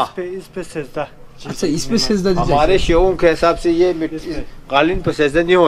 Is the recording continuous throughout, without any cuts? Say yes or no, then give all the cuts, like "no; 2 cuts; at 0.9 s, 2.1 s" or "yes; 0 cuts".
yes; 0 cuts